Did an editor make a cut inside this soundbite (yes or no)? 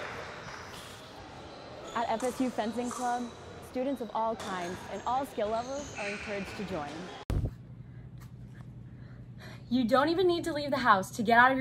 yes